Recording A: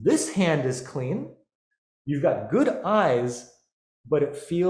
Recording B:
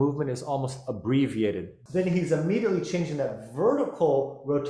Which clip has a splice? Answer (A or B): B